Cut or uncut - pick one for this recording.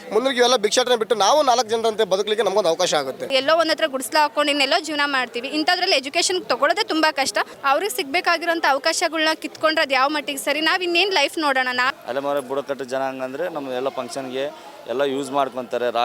cut